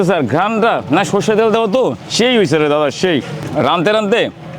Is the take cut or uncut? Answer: cut